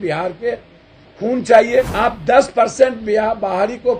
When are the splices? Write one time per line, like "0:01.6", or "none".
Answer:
0:01.9